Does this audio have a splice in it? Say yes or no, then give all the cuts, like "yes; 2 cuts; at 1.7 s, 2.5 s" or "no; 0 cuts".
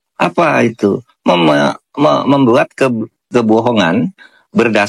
no; 0 cuts